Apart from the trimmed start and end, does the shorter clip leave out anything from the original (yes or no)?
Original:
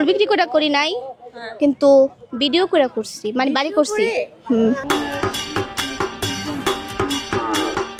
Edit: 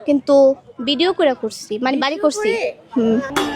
no